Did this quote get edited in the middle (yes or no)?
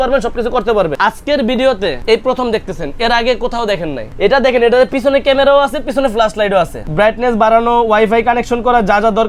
yes